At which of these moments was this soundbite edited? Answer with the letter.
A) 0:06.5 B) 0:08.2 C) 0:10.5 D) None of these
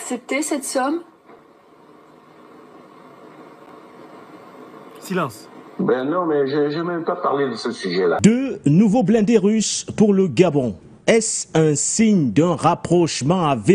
B